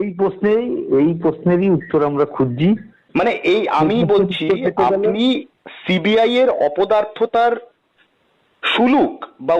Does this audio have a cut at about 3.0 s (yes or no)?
yes